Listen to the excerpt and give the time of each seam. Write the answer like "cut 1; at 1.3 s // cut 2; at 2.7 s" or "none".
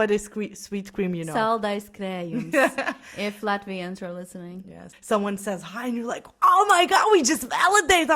cut 1; at 4.9 s